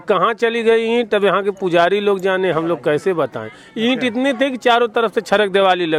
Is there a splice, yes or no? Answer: no